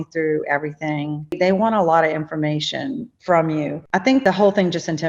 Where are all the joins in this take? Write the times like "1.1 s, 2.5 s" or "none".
1.3 s, 3.1 s, 4.2 s